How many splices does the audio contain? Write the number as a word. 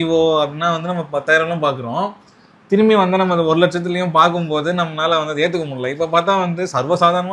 zero